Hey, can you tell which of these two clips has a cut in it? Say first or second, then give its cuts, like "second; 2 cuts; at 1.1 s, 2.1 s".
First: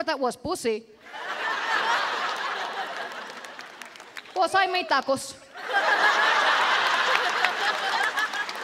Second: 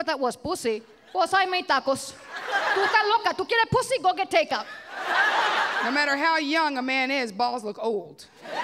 second; 3 cuts; at 0.9 s, 2.7 s, 5.8 s